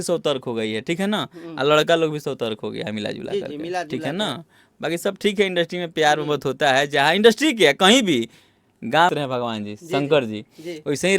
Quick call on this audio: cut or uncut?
cut